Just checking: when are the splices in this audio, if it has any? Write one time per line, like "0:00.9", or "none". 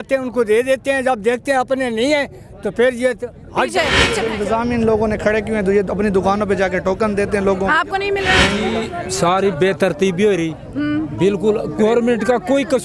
0:04.2
0:08.6